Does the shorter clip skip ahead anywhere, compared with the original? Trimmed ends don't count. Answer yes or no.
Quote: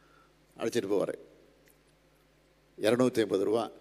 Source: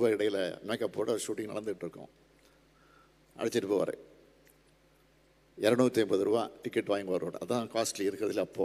no